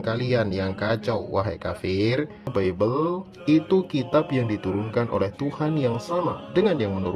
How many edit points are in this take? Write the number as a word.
one